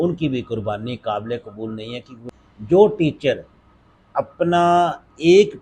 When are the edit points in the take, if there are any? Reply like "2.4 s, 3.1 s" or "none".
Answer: 2.3 s